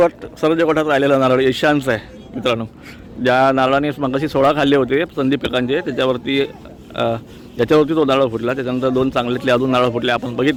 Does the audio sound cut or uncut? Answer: uncut